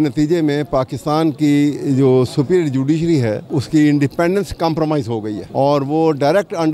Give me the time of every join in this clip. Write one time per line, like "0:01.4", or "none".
0:03.5
0:05.4